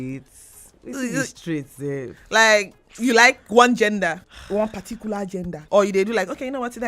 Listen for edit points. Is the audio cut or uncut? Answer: cut